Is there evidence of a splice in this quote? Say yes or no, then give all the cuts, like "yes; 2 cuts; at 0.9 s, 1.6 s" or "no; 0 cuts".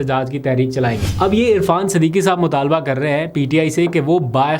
yes; 1 cut; at 1.0 s